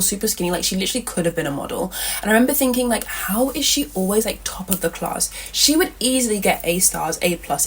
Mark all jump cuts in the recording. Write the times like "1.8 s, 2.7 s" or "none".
none